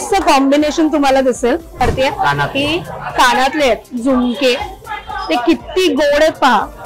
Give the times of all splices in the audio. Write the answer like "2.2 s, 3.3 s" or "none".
1.8 s